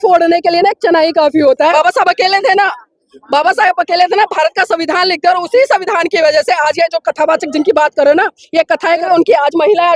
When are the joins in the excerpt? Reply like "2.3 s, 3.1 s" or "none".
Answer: 1.7 s, 9.0 s